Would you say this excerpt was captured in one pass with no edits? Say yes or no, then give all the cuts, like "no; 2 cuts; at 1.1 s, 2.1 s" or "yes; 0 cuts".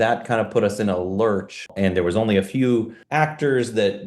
no; 2 cuts; at 1.7 s, 3.0 s